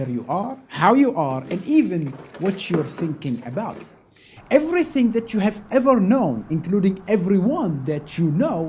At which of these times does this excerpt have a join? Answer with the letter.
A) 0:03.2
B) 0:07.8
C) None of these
C